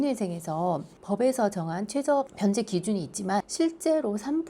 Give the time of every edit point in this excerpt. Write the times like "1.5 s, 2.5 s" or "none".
2.3 s, 3.5 s